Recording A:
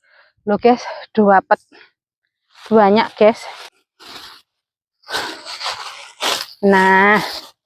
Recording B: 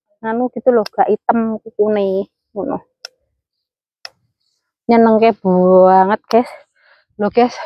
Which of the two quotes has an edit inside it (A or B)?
A